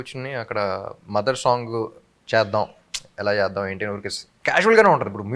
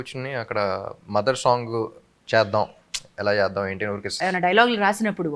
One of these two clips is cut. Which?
second; 1 cut; at 4.2 s

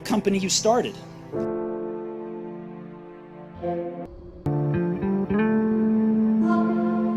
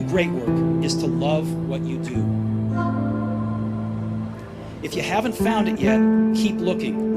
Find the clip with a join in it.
first; 1 cut; at 4.1 s

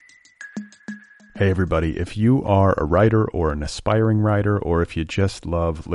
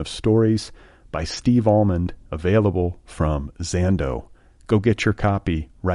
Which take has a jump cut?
first; 1 cut; at 0.9 s

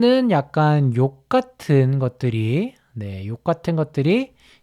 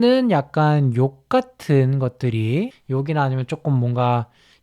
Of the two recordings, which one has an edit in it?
second; 1 cut; at 2.8 s

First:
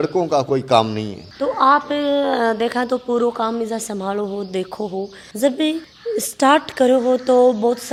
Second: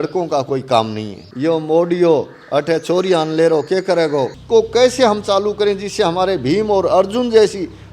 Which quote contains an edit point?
second; 2 cuts; at 1.3 s, 4.4 s

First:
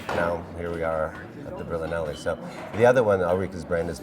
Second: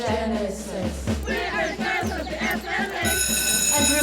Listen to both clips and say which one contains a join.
second; 1 cut; at 2.3 s

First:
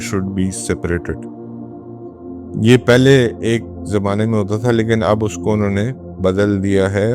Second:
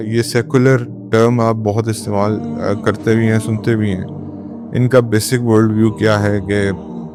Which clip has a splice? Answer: first; 2 cuts; at 1.2 s, 2.3 s

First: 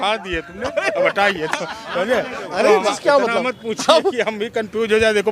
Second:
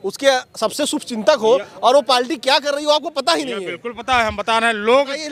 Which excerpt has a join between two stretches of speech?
first; 1 cut; at 2.9 s

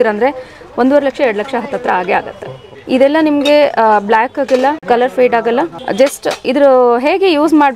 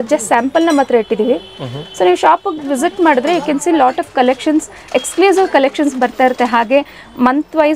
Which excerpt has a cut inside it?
first; 3 cuts; at 2.7 s, 4.8 s, 5.8 s

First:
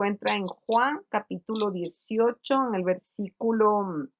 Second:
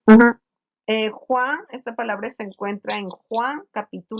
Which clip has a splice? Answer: second; 1 cut; at 1.7 s

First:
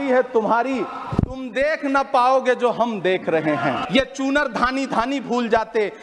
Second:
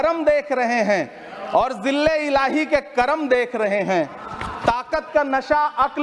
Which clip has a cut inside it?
first; 1 cut; at 3.8 s

